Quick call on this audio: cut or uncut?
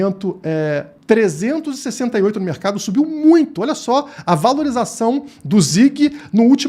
uncut